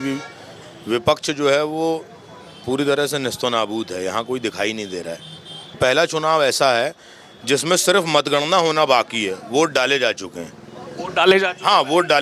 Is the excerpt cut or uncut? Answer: cut